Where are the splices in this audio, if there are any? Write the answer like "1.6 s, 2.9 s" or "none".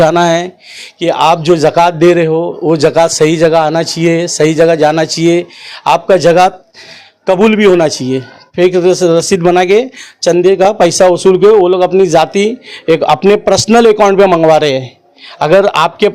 8.4 s